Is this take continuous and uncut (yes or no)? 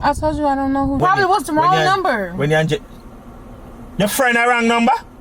no